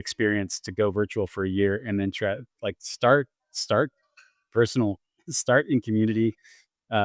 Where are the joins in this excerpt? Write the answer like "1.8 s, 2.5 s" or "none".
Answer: none